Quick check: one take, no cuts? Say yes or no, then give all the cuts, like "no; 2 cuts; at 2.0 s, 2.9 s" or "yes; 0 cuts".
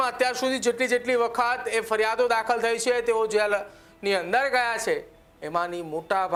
yes; 0 cuts